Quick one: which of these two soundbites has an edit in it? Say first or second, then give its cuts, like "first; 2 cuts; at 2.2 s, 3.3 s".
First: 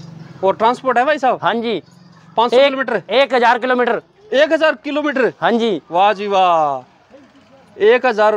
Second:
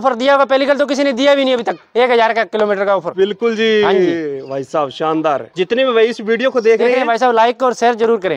second; 1 cut; at 5.5 s